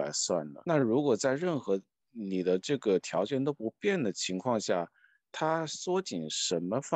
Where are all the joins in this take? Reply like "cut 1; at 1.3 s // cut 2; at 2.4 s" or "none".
none